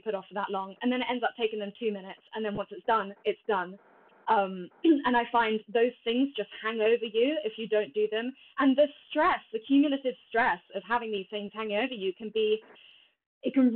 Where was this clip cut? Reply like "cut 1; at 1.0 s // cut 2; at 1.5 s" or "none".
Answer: none